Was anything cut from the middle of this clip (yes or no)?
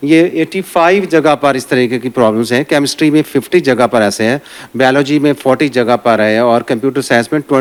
no